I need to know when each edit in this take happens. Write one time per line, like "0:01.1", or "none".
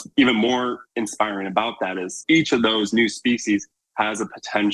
0:00.8
0:02.2